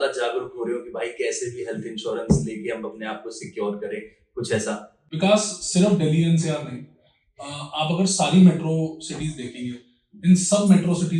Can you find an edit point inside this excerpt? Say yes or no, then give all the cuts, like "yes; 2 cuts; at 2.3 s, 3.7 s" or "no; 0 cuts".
no; 0 cuts